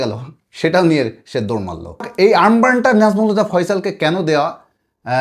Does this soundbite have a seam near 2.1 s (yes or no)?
yes